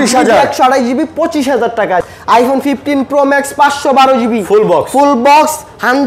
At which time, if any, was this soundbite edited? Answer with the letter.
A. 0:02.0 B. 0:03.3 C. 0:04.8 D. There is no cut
A